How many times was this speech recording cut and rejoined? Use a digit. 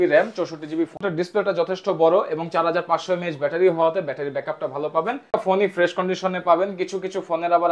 2